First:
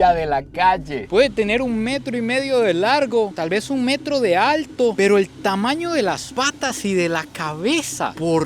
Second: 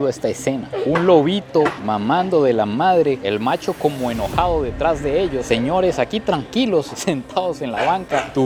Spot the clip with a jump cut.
first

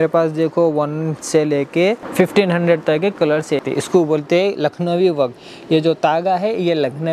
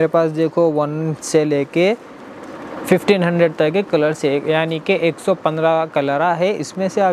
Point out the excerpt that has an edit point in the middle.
first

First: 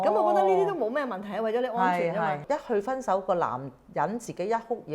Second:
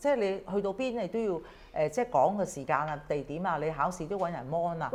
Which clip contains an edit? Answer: first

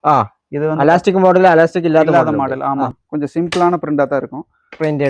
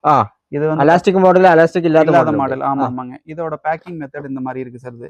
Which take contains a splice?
first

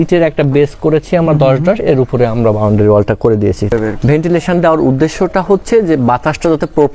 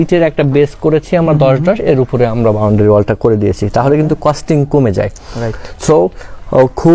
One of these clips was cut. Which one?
first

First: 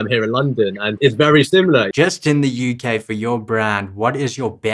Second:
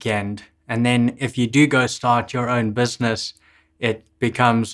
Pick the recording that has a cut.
first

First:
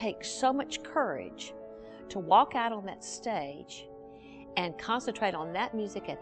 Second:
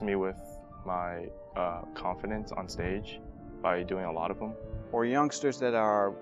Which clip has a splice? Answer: second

